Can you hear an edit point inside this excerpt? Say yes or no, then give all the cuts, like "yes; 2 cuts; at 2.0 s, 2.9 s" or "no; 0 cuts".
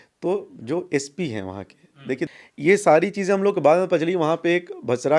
yes; 1 cut; at 2.3 s